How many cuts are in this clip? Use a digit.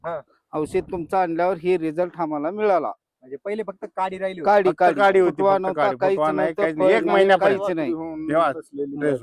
0